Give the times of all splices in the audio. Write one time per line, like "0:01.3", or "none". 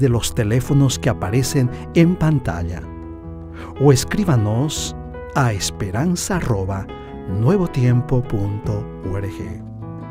none